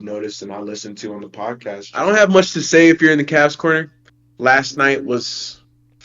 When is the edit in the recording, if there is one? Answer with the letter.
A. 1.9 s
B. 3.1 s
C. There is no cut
A